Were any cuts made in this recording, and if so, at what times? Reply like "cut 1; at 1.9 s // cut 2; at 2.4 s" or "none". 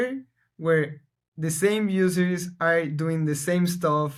none